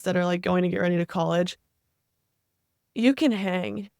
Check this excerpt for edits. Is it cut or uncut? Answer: cut